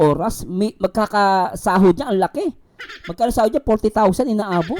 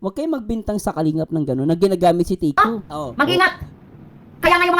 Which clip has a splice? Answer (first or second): second